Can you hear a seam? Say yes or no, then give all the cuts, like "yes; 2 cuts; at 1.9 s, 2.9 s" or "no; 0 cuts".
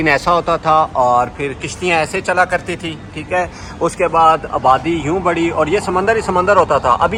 no; 0 cuts